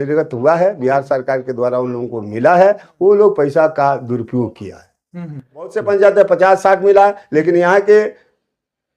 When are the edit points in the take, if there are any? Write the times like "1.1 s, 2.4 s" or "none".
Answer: 5.8 s